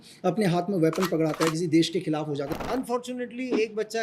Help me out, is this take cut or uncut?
cut